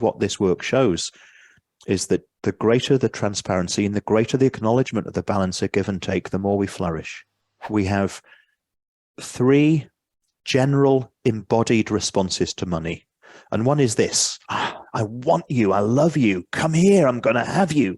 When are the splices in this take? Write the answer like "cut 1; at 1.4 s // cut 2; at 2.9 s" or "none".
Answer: cut 1; at 7.6 s